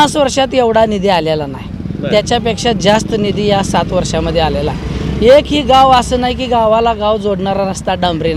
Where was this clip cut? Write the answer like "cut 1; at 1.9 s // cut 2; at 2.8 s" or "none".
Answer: none